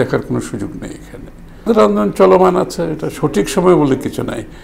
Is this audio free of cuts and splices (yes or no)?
no